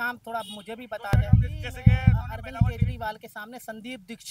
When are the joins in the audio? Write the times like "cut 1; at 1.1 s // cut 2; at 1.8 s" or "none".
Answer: cut 1; at 1.2 s // cut 2; at 2.9 s